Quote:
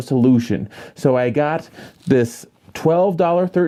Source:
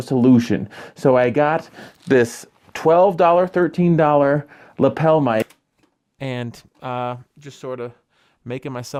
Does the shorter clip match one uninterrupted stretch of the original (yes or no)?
yes